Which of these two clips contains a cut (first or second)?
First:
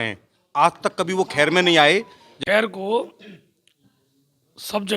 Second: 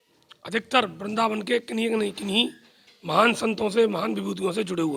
first